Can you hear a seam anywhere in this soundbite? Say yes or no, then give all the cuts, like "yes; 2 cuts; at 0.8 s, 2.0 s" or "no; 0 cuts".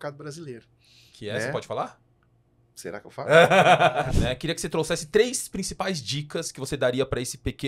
yes; 1 cut; at 4.1 s